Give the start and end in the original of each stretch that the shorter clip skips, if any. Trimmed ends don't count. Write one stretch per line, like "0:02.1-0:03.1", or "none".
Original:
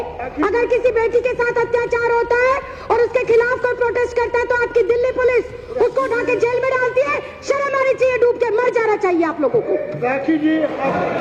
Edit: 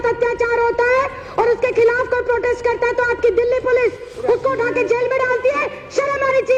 none